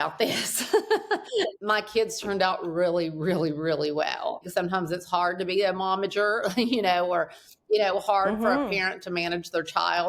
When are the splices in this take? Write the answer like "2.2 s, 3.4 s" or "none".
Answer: 1.1 s, 4.4 s